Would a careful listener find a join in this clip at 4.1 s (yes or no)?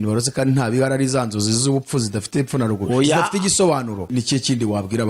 yes